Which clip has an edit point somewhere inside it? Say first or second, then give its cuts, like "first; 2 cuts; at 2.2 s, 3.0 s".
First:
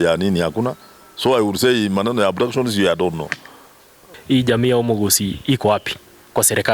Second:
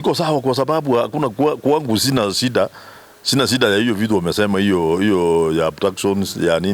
first; 1 cut; at 4.1 s